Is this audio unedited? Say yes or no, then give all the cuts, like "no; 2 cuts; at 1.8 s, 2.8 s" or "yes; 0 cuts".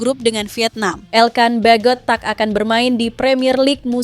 no; 1 cut; at 1.0 s